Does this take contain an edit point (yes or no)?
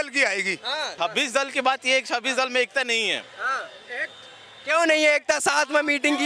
no